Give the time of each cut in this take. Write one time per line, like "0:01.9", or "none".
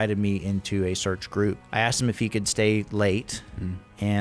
0:01.6